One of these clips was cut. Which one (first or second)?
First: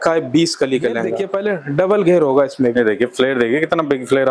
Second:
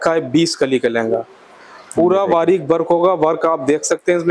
first